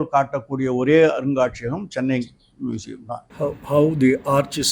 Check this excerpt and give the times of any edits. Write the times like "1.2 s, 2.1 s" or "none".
3.2 s

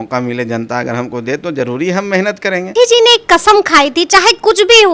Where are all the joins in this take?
2.7 s

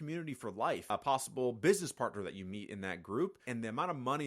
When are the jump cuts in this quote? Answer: 0.9 s, 3.4 s

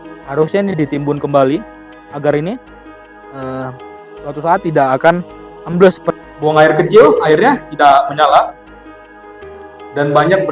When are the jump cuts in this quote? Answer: 6.1 s

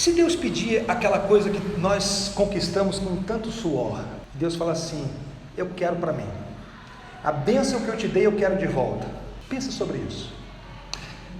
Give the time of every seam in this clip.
4.2 s, 9.3 s

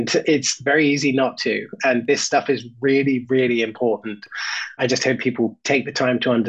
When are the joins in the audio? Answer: none

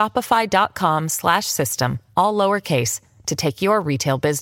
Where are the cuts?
none

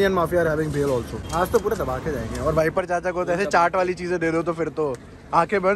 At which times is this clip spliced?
1.2 s

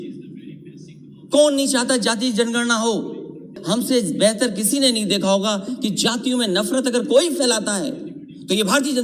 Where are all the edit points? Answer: 3.5 s

